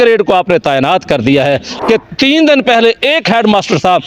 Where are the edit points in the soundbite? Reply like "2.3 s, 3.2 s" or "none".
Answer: 1.7 s